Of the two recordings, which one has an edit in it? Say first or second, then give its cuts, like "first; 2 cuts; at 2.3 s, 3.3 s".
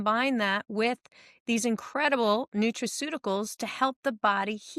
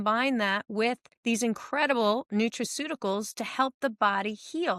second; 1 cut; at 1.1 s